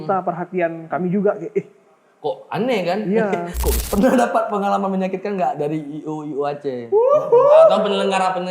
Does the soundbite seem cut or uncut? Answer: cut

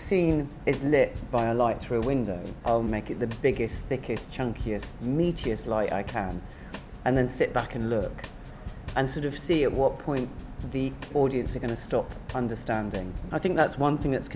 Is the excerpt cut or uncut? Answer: cut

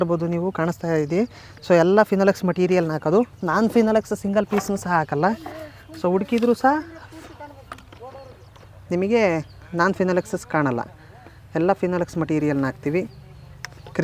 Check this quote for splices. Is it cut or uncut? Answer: uncut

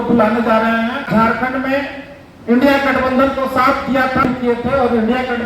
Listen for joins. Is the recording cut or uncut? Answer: cut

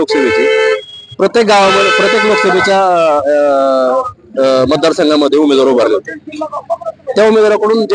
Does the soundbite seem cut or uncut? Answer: uncut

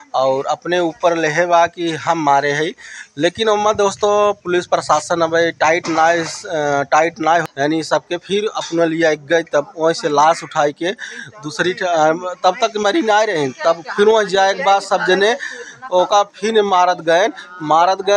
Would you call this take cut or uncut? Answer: cut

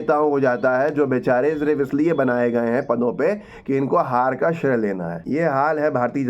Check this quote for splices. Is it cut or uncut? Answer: cut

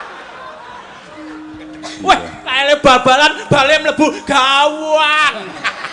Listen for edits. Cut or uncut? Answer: uncut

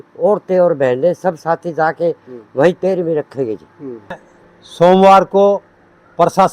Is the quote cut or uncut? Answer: cut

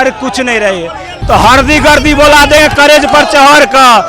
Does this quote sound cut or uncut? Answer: cut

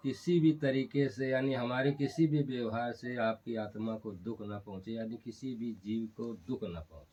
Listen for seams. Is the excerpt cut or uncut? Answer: uncut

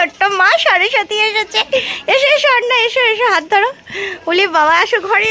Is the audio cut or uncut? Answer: uncut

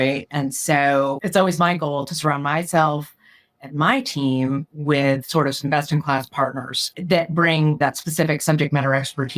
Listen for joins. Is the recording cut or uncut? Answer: cut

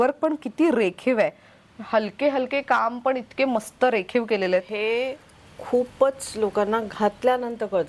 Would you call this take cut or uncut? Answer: uncut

